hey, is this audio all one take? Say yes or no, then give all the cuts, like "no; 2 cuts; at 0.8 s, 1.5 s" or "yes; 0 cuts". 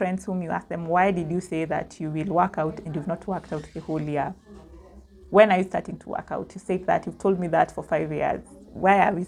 yes; 0 cuts